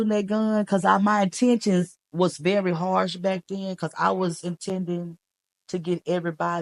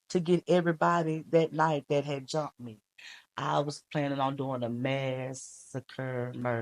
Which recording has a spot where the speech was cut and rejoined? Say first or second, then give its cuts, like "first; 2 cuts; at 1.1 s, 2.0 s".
second; 1 cut; at 2.9 s